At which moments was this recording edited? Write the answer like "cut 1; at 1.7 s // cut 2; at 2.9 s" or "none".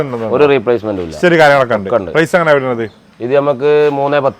none